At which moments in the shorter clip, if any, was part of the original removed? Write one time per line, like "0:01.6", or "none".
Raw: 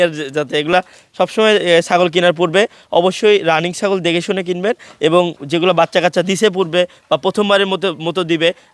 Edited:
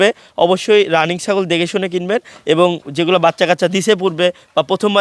none